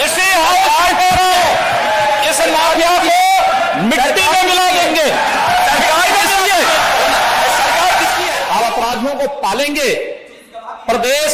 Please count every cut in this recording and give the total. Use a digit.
1